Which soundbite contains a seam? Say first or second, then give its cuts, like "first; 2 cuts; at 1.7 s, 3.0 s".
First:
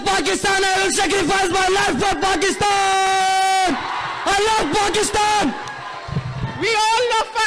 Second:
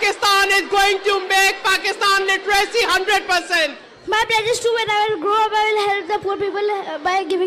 second; 1 cut; at 3.9 s